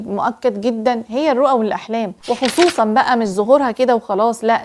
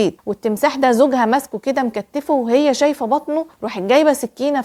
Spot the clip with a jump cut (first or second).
first